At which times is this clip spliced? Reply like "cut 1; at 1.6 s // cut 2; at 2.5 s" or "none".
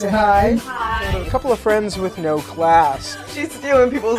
cut 1; at 1.2 s